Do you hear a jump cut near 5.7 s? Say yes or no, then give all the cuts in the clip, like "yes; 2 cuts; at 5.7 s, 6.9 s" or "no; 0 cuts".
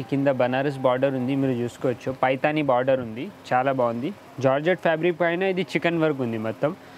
no; 1 cut; at 4.2 s